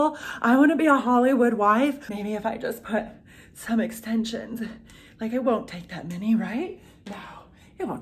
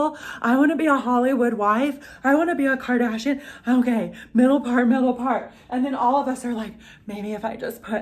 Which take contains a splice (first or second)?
first